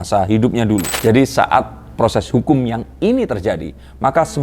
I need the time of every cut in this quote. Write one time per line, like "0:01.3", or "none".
0:00.9